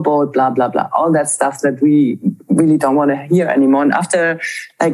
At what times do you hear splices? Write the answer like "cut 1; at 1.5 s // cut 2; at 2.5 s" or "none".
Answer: none